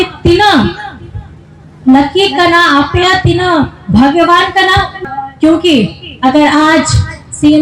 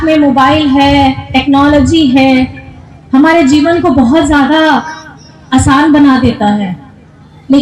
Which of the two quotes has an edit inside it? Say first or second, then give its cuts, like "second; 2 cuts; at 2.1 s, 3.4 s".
first; 1 cut; at 5.0 s